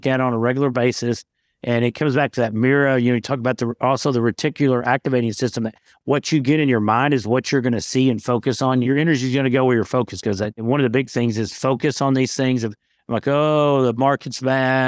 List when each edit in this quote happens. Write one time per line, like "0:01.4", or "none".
0:08.8
0:10.6